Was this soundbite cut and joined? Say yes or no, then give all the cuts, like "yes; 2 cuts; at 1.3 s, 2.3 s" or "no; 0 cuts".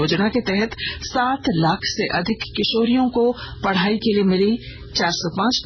no; 0 cuts